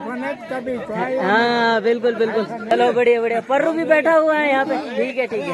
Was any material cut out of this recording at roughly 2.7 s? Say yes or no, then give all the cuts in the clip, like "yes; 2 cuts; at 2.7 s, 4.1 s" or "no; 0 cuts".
yes; 1 cut; at 2.7 s